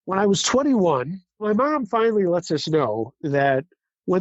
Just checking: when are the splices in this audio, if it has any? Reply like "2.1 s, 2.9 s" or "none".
1.4 s